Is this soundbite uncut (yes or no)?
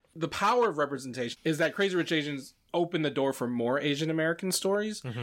yes